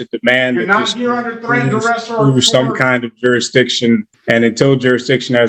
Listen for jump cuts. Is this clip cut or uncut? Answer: cut